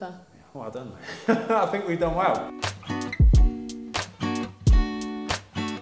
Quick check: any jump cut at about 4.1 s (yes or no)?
no